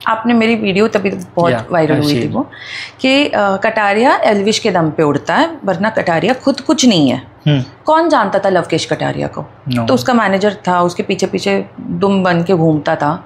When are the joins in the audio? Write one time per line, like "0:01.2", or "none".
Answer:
none

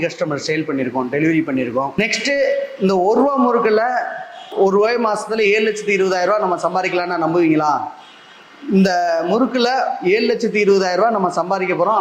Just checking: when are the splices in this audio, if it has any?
0:02.0

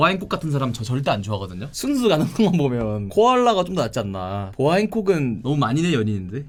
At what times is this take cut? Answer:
none

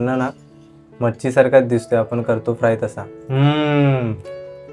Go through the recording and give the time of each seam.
0:03.1

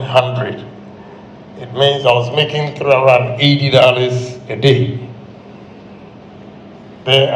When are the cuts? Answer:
none

